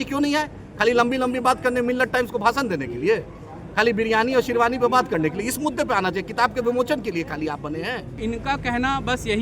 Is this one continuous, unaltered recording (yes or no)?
no